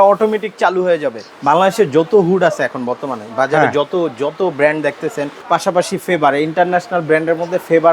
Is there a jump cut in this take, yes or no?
yes